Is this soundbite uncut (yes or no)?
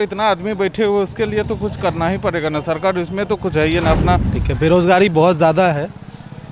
no